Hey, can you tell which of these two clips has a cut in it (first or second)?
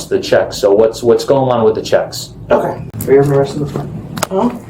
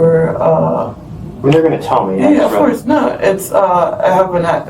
first